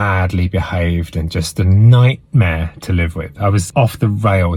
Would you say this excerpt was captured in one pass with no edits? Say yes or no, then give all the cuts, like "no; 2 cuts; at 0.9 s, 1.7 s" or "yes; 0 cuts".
no; 1 cut; at 3.7 s